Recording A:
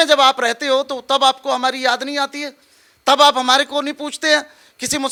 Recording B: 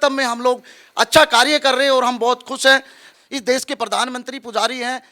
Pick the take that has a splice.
B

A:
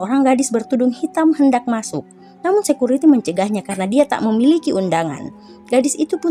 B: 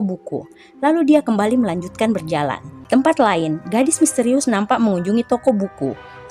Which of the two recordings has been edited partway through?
B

